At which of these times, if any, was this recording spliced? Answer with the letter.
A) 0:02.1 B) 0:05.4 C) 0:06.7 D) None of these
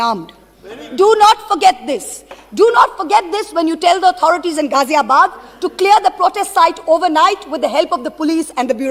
D